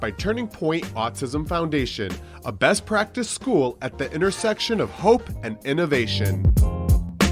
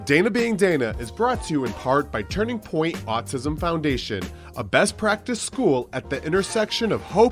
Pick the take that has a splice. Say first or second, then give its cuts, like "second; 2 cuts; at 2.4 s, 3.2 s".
first; 1 cut; at 6.4 s